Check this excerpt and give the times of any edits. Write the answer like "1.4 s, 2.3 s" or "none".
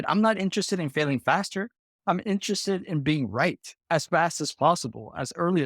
3.7 s